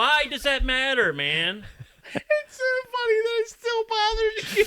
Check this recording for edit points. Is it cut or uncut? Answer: cut